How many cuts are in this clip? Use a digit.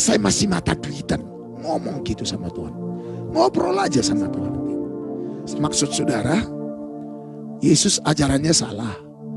1